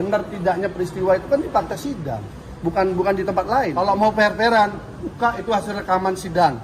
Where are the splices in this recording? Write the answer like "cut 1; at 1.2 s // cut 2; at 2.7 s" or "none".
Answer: cut 1; at 3.8 s